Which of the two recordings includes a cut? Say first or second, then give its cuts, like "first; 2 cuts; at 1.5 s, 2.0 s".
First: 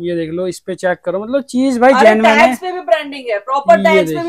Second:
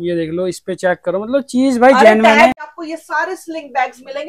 second; 1 cut; at 2.7 s